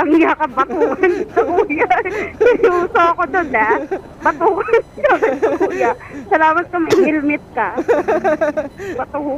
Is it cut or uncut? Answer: uncut